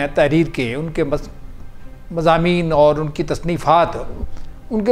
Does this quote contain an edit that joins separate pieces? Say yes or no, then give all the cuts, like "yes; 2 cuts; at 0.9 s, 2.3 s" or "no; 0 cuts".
no; 0 cuts